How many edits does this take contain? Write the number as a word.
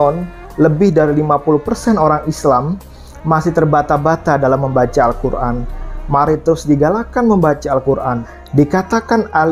one